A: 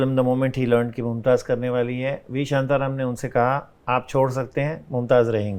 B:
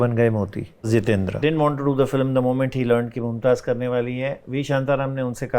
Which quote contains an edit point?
B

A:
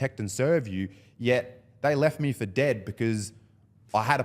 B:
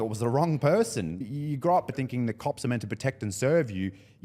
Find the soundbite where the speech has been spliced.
B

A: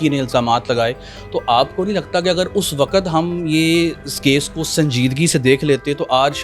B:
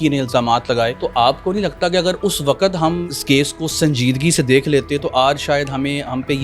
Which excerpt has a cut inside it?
B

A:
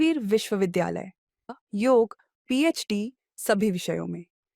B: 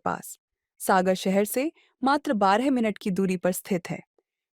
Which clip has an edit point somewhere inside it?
A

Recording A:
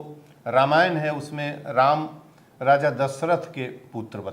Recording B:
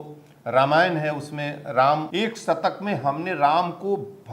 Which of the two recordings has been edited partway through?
B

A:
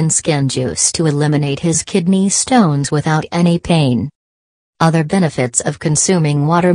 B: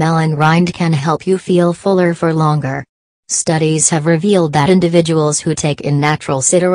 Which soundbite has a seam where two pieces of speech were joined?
B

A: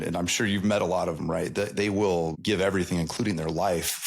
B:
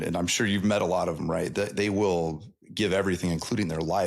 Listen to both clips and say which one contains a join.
A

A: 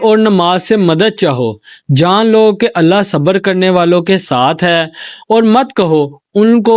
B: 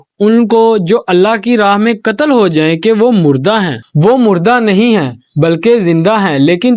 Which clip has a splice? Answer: B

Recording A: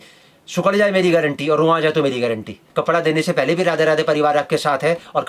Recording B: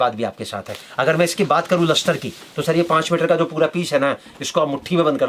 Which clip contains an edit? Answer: A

